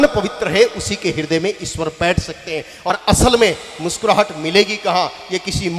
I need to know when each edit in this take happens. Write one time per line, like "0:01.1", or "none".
0:02.9